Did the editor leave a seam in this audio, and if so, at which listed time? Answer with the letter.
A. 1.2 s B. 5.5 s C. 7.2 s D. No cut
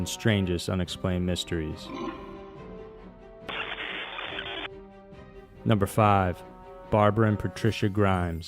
C